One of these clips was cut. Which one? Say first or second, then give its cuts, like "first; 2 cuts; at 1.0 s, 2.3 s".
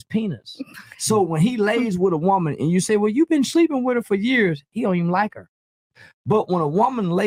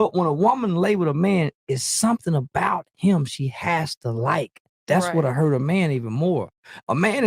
second; 1 cut; at 6.0 s